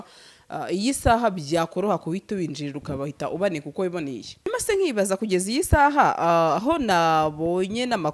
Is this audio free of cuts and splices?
no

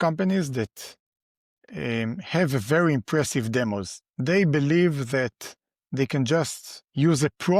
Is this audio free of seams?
yes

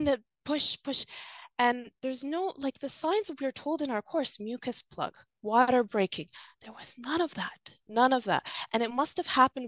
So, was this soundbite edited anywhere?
no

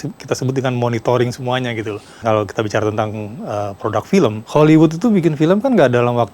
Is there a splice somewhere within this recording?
yes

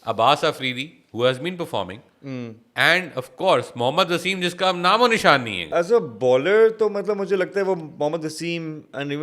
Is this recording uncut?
no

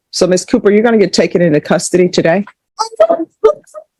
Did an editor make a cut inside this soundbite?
no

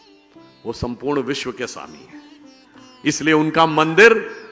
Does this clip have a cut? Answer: no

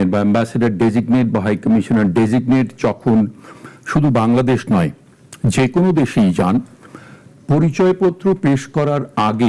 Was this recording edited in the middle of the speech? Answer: no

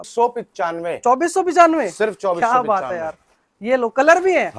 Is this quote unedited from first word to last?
yes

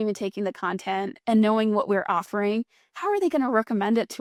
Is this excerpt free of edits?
yes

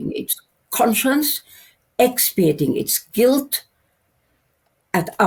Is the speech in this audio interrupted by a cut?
no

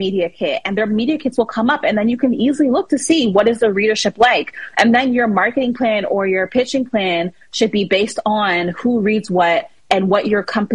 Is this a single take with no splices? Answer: yes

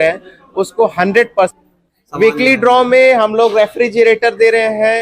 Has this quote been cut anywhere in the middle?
yes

